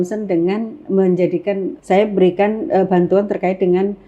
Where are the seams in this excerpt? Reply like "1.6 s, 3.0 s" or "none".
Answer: 1.7 s